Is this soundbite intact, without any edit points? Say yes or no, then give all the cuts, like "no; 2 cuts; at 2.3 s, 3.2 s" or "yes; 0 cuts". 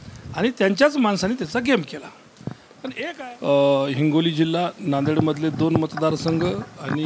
no; 1 cut; at 3.1 s